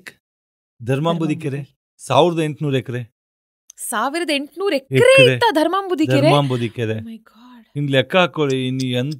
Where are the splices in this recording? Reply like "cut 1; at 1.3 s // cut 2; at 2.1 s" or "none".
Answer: none